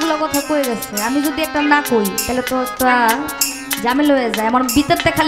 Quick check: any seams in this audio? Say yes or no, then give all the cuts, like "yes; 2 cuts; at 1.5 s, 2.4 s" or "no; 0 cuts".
no; 0 cuts